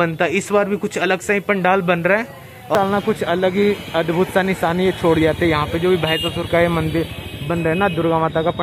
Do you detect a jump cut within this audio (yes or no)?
yes